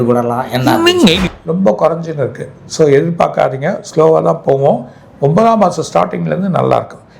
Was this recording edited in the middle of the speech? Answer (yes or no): yes